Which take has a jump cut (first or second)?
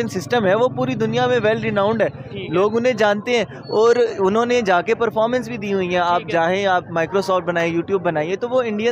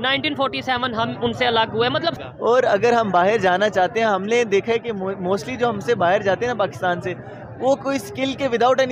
second